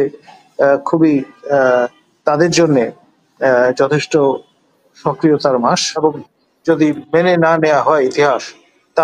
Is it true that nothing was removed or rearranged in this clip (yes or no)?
no